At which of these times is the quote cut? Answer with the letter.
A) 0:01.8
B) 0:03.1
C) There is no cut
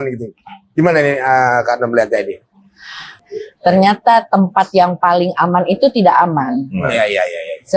B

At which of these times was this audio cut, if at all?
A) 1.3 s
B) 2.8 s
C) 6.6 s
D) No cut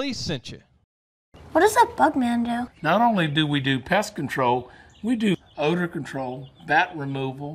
A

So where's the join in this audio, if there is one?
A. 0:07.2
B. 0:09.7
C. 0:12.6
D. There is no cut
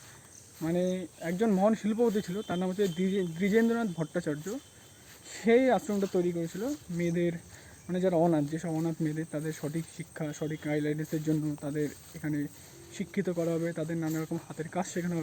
D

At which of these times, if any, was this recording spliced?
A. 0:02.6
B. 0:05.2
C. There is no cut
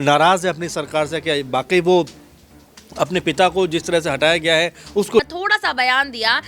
B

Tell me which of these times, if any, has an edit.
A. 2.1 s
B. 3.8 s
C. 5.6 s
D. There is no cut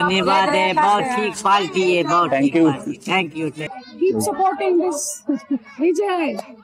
B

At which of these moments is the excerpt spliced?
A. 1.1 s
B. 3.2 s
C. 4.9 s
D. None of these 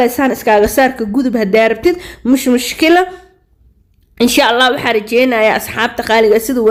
D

